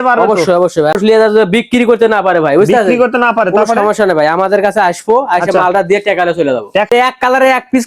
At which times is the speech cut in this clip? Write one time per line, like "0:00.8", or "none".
0:01.0
0:06.9